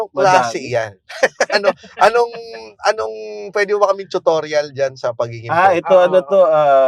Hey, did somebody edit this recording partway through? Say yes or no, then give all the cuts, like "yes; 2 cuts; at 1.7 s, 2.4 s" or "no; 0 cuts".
no; 0 cuts